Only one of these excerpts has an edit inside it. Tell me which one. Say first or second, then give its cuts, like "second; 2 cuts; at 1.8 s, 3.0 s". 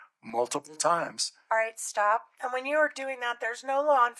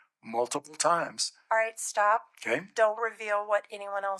first; 1 cut; at 2.3 s